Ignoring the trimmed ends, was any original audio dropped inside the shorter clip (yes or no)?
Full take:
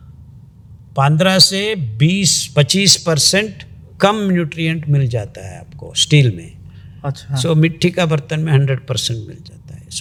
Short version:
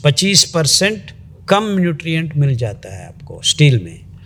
no